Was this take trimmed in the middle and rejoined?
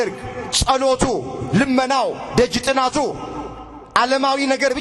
no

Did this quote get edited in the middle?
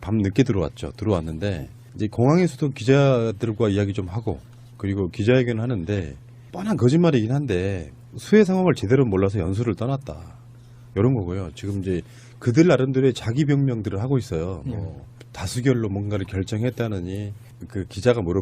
yes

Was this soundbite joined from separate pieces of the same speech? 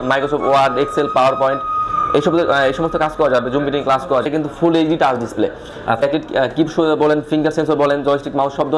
yes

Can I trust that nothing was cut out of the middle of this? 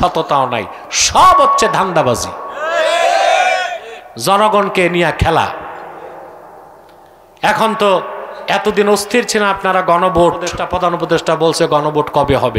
no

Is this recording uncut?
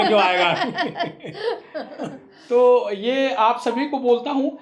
yes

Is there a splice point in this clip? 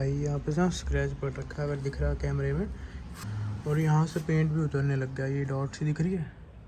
yes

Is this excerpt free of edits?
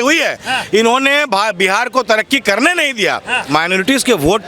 no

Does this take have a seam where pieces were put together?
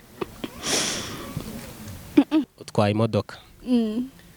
yes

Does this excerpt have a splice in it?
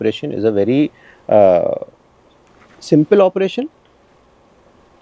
no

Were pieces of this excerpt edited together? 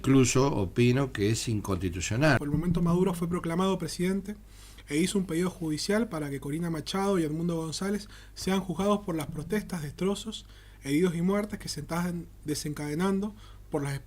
yes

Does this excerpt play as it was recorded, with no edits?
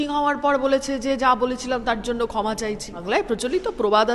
no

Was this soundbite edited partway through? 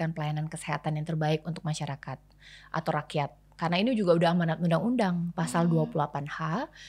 no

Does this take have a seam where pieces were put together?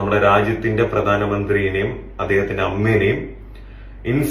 no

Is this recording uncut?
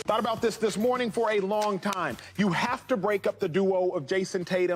yes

